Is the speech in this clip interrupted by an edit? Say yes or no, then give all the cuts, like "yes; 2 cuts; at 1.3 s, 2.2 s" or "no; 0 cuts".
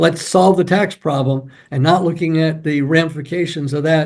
no; 0 cuts